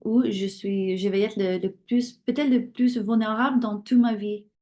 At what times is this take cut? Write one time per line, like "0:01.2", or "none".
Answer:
none